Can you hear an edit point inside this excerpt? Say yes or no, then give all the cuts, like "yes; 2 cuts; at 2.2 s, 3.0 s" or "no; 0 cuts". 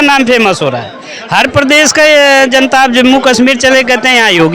no; 0 cuts